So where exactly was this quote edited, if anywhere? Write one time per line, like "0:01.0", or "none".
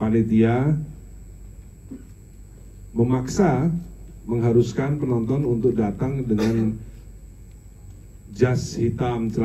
none